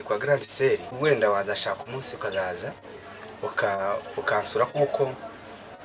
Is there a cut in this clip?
yes; 1 cut; at 0.9 s

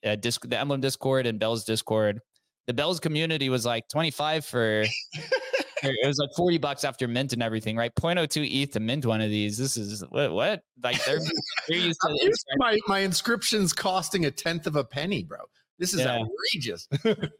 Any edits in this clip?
no; 0 cuts

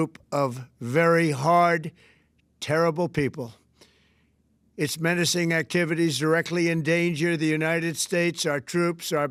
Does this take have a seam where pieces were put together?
no; 0 cuts

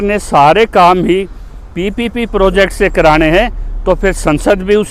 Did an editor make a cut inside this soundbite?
no; 0 cuts

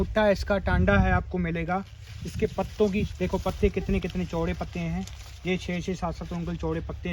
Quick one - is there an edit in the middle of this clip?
no; 0 cuts

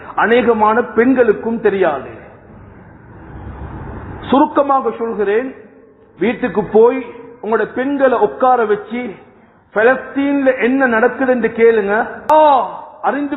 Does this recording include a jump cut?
yes; 1 cut; at 12.3 s

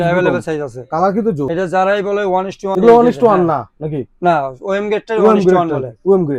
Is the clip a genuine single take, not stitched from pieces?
yes; 0 cuts

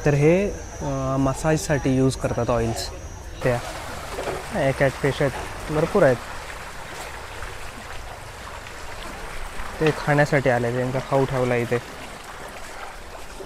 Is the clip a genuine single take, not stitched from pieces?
no; 1 cut; at 3.4 s

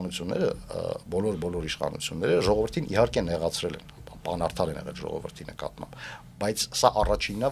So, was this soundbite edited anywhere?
no; 0 cuts

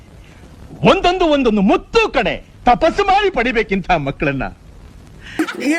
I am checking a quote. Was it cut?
no; 0 cuts

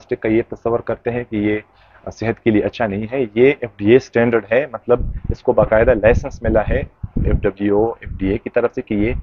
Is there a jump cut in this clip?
no; 0 cuts

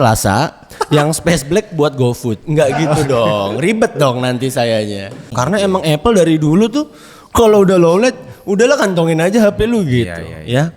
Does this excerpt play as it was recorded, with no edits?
no; 1 cut; at 5.2 s

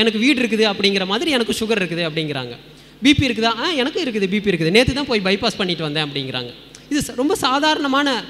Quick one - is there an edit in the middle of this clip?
no; 0 cuts

